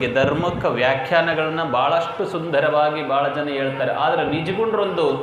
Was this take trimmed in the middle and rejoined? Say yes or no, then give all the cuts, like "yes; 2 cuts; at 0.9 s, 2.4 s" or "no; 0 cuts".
no; 0 cuts